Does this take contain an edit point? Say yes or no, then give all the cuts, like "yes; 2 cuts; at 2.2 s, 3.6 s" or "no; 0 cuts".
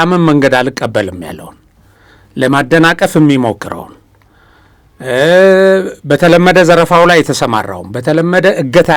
no; 0 cuts